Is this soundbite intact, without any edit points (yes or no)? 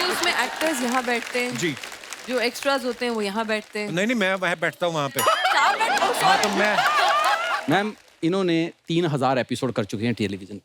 no